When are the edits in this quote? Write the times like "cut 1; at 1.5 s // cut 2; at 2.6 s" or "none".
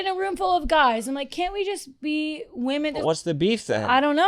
cut 1; at 3.0 s